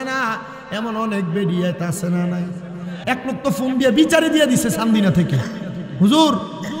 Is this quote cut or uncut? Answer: cut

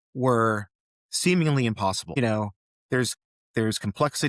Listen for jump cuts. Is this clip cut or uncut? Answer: cut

